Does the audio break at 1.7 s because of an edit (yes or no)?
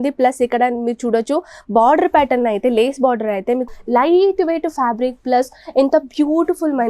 no